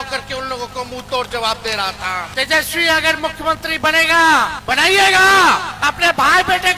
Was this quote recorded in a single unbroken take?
no; 3 cuts; at 2.3 s, 4.6 s, 5.7 s

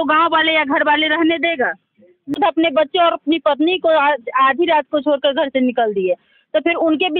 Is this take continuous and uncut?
no; 1 cut; at 2.3 s

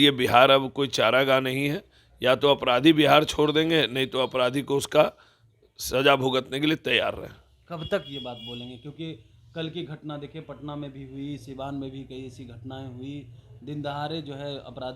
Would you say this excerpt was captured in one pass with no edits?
yes; 0 cuts

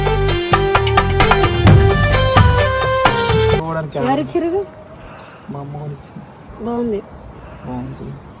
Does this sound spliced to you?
yes; 1 cut; at 3.7 s

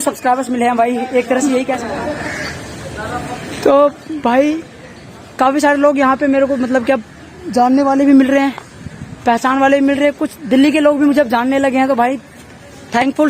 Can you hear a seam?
yes; 1 cut; at 1.9 s

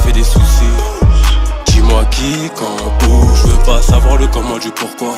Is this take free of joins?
yes; 0 cuts

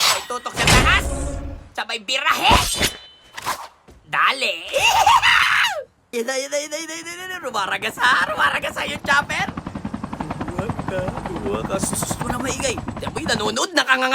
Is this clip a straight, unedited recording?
no; 1 cut; at 6.0 s

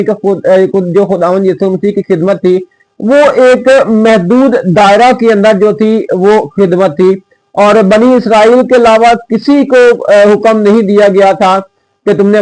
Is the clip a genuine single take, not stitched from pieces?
yes; 0 cuts

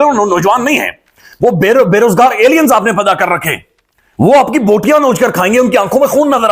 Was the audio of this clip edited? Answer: no; 0 cuts

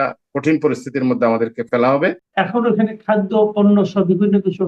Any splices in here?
yes; 1 cut; at 2.2 s

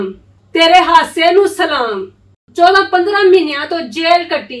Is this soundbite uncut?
no; 1 cut; at 2.5 s

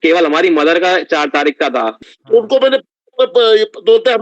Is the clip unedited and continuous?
no; 1 cut; at 1.9 s

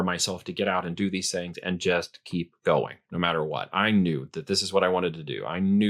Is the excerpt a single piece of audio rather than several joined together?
yes; 0 cuts

